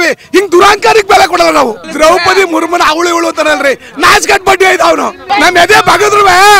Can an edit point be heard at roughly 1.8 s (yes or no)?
yes